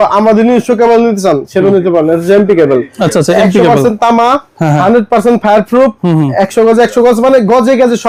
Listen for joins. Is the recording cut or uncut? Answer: uncut